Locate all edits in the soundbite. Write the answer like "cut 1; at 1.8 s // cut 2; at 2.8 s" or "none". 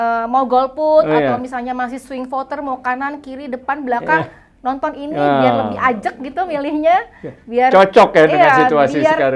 none